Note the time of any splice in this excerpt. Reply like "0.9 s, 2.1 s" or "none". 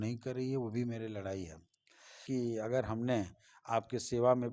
2.2 s